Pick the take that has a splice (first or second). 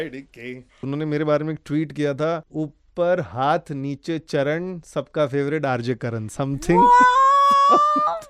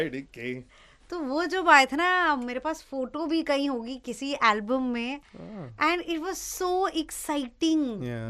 first